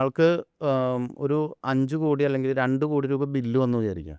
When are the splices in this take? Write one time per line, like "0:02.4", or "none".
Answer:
none